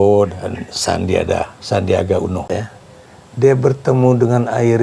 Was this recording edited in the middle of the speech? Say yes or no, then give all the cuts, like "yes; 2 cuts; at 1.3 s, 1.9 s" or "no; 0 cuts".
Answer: yes; 1 cut; at 2.5 s